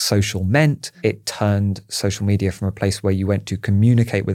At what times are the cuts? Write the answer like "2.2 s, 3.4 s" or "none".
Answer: 1.0 s